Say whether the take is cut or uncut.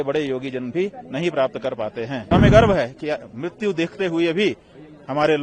cut